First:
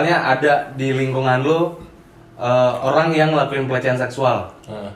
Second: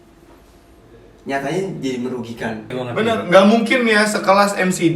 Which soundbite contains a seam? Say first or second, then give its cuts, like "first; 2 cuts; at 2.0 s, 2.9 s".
second; 1 cut; at 2.7 s